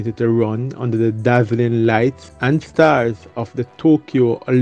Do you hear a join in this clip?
yes; 1 cut; at 2.3 s

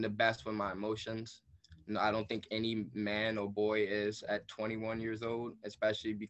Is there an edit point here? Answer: no; 0 cuts

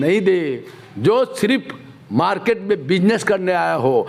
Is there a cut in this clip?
no; 0 cuts

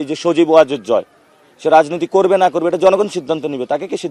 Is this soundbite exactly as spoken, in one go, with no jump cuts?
yes; 0 cuts

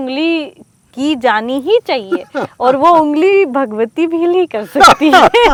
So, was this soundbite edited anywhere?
no; 0 cuts

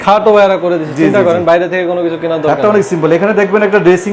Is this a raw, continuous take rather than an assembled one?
yes; 0 cuts

